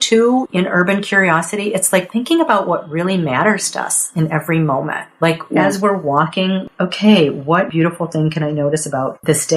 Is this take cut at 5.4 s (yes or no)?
no